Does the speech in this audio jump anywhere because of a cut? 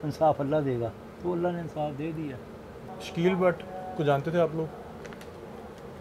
yes; 1 cut; at 2.9 s

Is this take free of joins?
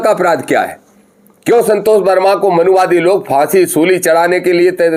yes; 0 cuts

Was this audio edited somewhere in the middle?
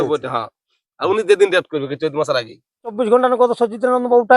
yes; 1 cut; at 3.0 s

